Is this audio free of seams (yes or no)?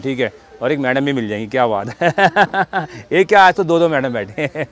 yes